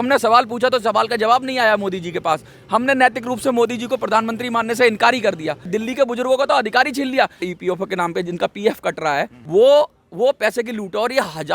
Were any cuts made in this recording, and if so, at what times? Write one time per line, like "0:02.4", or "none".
0:05.7
0:07.5
0:09.4